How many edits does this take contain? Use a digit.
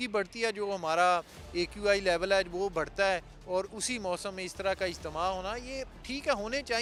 0